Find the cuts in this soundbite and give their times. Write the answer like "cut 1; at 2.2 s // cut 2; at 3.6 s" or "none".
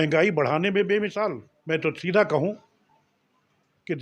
cut 1; at 1.5 s